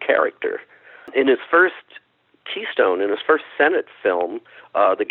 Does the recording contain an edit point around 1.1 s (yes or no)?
yes